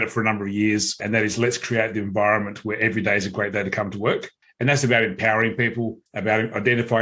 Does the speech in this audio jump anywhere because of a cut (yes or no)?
yes